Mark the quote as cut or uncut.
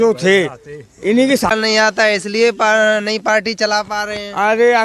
cut